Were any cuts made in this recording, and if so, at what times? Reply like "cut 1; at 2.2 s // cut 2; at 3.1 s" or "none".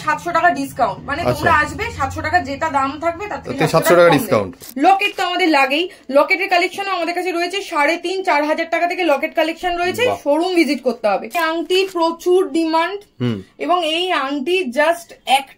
cut 1; at 4.6 s // cut 2; at 11.4 s